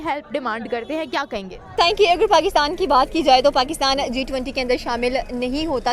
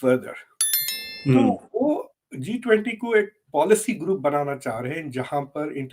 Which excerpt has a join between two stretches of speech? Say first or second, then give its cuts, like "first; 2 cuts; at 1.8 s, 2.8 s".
first; 1 cut; at 1.8 s